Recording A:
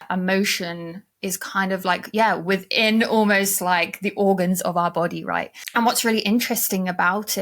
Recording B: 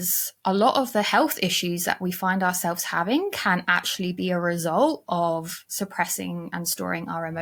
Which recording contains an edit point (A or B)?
A